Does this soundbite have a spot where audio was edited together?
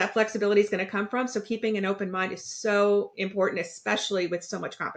no; 0 cuts

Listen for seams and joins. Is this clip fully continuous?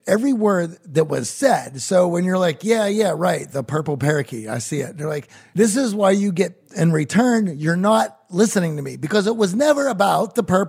no; 1 cut; at 5.3 s

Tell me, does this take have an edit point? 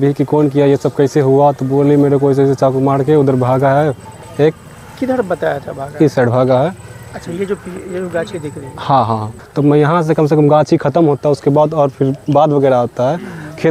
yes; 1 cut; at 9.4 s

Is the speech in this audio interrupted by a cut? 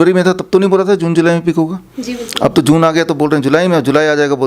no; 0 cuts

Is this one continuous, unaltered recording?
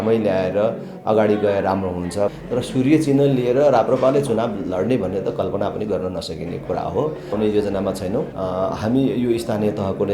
no; 3 cuts; at 2.4 s, 7.3 s, 8.3 s

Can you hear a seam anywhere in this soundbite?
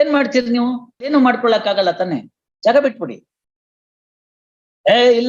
yes; 1 cut; at 1.1 s

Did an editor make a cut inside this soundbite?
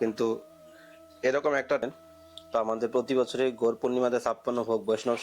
yes; 1 cut; at 1.8 s

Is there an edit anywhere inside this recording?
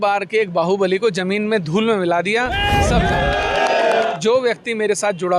yes; 1 cut; at 4.1 s

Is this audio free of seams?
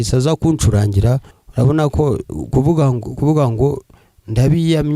no; 1 cut; at 1.4 s

